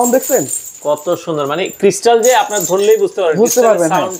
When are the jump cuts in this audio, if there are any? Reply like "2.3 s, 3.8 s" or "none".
none